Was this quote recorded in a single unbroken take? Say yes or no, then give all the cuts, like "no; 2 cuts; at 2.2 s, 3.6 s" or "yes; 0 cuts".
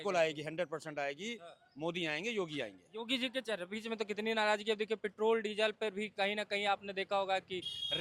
yes; 0 cuts